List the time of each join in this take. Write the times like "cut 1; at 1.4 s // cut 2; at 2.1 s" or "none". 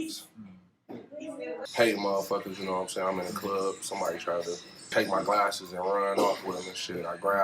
cut 1; at 1.6 s // cut 2; at 4.9 s